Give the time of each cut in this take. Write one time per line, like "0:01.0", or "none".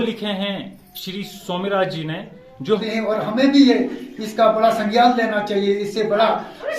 0:02.8